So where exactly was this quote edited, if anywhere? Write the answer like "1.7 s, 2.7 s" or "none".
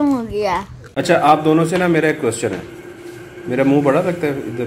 0.9 s